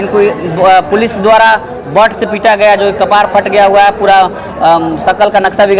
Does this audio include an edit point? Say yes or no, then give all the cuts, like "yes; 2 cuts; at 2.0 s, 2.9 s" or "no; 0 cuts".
no; 0 cuts